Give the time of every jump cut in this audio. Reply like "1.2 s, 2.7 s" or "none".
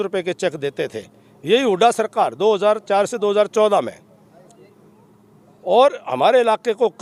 none